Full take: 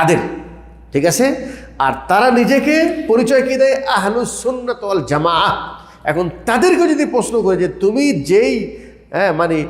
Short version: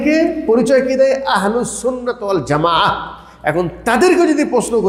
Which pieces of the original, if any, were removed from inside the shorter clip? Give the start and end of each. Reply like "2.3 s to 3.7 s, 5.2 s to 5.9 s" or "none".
none